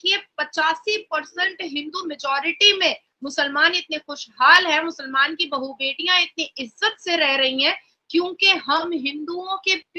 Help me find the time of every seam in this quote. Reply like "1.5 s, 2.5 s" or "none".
none